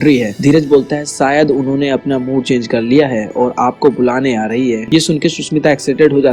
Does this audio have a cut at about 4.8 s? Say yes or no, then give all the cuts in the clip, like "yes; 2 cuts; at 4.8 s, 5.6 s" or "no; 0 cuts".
yes; 1 cut; at 4.8 s